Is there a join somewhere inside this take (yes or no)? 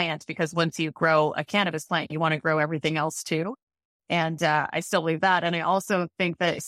no